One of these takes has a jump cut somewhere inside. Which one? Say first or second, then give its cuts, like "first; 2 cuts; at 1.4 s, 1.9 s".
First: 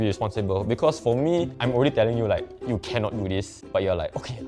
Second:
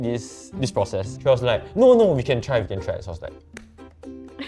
first; 2 cuts; at 1.6 s, 3.6 s